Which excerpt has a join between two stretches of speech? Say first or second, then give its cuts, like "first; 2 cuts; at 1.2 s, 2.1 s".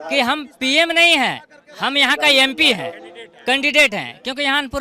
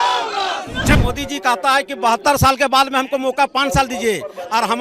second; 1 cut; at 0.9 s